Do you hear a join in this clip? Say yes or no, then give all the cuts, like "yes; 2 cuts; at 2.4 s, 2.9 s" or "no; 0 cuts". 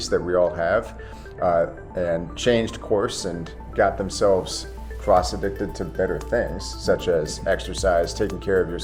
no; 0 cuts